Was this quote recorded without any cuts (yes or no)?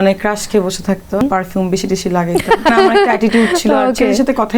no